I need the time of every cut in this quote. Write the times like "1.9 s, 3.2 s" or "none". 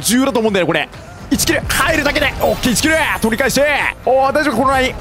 3.9 s